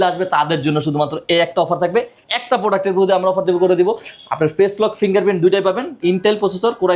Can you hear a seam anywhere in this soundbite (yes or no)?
yes